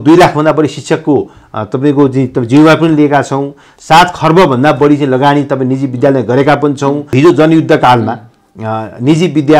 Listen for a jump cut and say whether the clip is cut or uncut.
cut